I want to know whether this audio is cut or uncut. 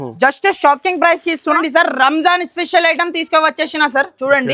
cut